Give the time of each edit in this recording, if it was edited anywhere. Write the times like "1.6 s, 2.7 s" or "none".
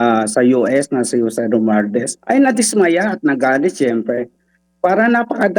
2.1 s